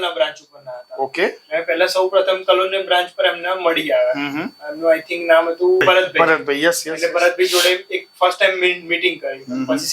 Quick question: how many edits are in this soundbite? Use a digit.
1